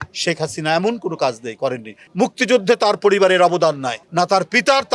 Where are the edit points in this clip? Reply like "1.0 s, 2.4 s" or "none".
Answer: 2.0 s, 4.0 s